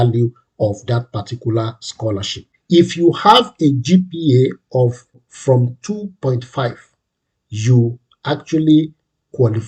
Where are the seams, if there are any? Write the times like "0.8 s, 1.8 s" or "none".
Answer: 2.5 s